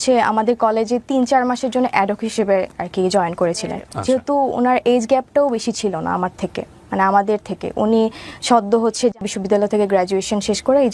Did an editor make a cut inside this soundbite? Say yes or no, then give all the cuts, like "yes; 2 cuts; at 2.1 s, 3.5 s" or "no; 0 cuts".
yes; 2 cuts; at 3.9 s, 9.3 s